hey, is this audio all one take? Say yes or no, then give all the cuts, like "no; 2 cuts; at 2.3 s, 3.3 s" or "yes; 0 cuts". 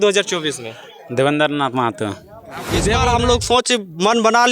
no; 1 cut; at 2.9 s